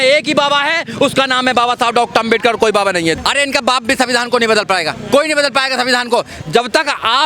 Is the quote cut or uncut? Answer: cut